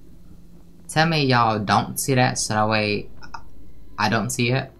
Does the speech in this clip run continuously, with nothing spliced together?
yes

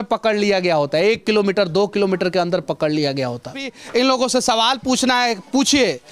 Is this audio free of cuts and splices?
no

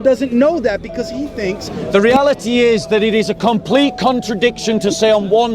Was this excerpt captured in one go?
no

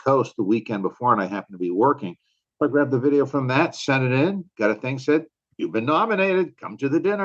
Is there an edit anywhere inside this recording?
no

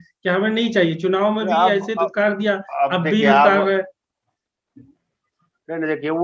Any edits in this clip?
no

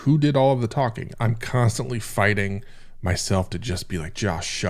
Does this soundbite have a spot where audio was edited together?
yes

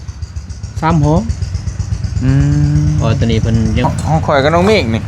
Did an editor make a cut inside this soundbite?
yes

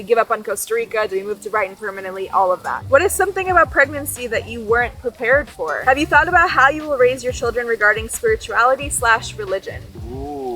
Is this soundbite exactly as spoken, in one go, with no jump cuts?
no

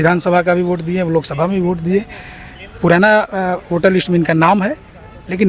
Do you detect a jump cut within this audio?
no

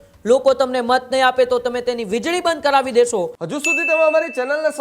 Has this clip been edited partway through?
yes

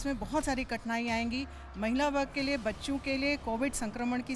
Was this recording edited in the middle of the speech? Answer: no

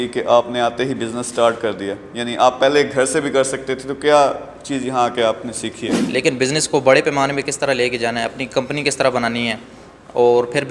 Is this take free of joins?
no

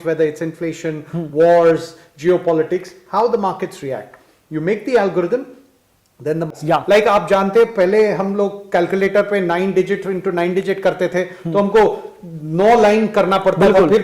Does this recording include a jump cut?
yes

